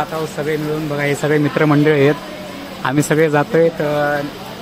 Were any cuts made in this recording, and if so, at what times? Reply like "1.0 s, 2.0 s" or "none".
none

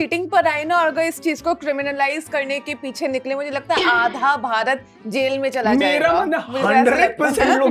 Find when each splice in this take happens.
none

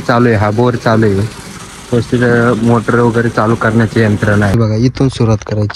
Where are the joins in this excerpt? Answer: 4.5 s

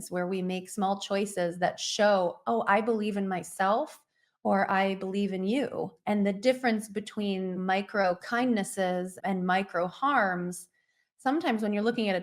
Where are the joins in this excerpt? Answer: 6.0 s, 7.6 s

